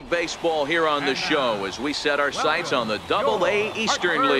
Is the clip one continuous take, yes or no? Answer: yes